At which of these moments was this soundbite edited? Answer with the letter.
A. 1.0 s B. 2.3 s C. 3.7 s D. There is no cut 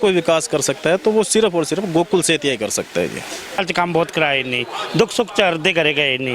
C